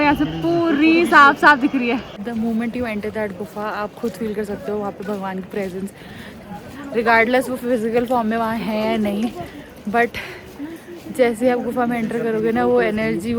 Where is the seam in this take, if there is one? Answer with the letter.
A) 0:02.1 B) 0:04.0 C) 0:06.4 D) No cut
A